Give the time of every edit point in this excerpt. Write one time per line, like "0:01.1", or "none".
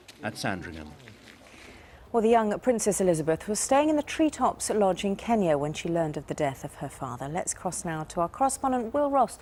none